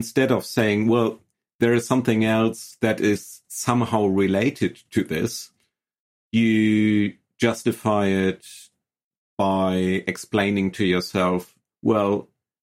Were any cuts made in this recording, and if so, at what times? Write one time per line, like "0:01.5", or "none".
none